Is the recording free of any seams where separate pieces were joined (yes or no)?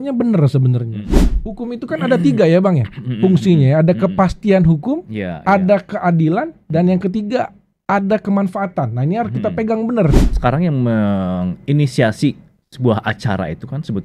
no